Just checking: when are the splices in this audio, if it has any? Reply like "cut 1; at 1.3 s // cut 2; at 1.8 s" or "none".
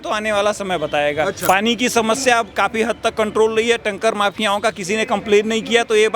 cut 1; at 1.4 s